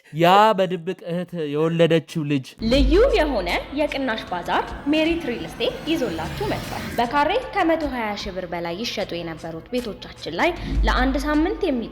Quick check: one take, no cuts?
no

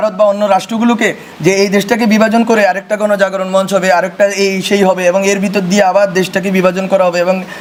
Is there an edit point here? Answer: no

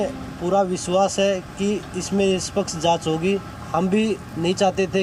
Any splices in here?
no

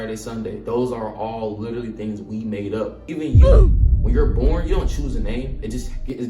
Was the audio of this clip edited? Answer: yes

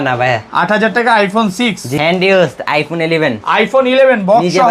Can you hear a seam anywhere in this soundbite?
yes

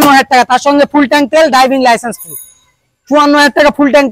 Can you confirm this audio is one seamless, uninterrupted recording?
yes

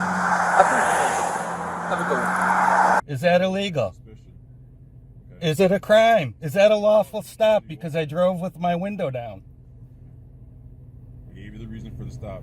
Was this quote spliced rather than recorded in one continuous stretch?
yes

